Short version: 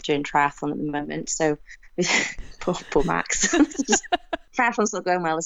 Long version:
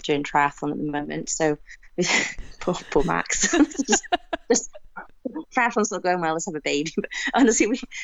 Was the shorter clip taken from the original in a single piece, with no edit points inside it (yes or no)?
no